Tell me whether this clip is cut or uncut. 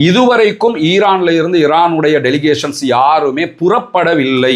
uncut